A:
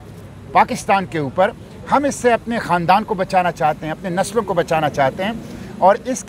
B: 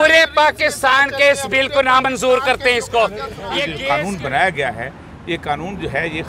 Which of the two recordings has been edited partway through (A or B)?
B